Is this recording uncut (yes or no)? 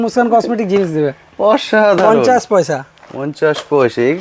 yes